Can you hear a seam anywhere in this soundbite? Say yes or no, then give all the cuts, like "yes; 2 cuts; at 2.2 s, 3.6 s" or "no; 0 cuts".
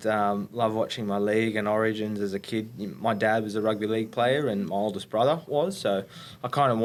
no; 0 cuts